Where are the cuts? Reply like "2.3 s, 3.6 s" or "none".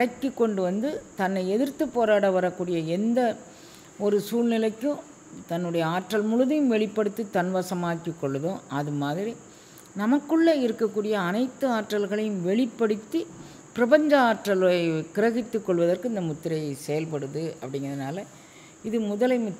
none